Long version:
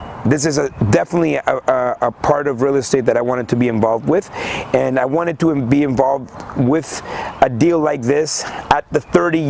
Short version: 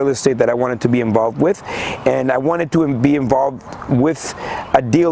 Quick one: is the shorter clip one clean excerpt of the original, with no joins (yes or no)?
yes